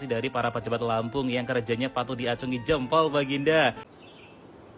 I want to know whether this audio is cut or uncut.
cut